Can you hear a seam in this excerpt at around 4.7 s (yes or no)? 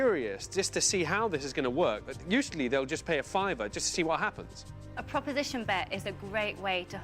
yes